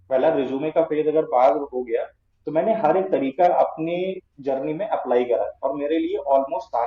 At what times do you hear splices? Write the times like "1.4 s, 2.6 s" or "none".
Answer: none